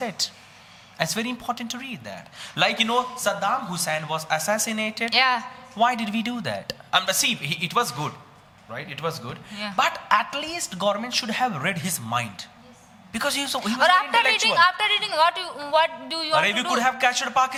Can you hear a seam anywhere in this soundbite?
no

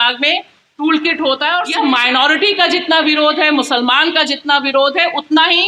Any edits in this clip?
yes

